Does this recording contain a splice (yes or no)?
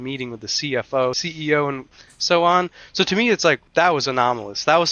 yes